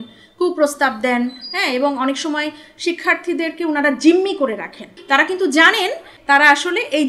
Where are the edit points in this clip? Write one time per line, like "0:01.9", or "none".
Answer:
0:04.9
0:06.1